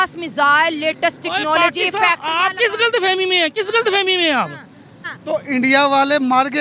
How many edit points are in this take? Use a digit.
1